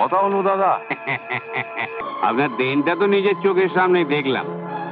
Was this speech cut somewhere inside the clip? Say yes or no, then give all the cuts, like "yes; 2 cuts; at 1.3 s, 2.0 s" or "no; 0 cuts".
yes; 1 cut; at 2.0 s